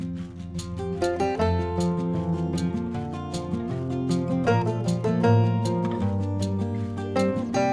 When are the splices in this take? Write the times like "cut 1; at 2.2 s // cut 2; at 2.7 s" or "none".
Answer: cut 1; at 1.0 s